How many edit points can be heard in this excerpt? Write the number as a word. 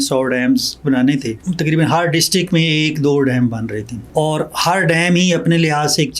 two